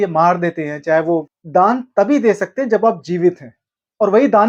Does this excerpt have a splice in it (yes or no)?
yes